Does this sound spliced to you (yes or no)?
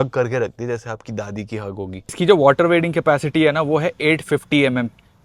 yes